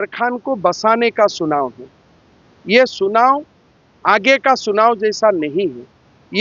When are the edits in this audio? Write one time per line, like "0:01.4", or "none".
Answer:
none

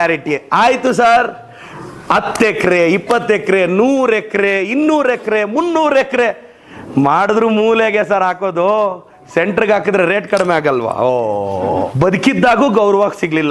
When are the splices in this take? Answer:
0:11.7

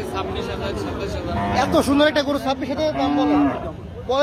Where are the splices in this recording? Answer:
none

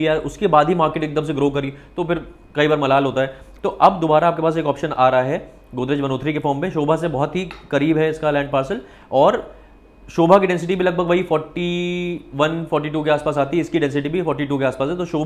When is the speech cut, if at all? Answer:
none

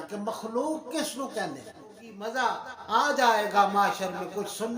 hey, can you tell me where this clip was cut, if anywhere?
0:02.3

